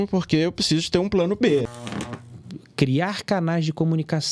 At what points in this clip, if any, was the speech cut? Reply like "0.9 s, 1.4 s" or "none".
2.1 s